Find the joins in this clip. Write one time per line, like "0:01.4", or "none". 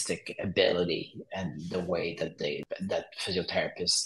0:02.7